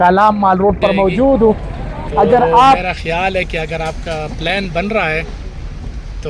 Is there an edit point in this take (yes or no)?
yes